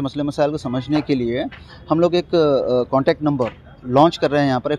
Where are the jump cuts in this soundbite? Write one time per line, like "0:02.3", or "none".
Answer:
none